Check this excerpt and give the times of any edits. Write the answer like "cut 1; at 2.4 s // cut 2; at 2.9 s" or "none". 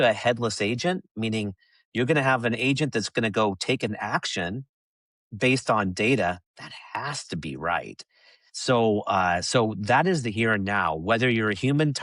none